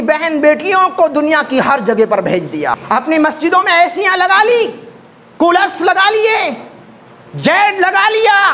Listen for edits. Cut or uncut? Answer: cut